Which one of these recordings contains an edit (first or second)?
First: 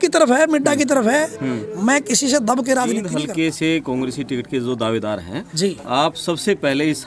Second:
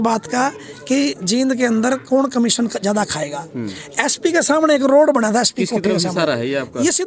first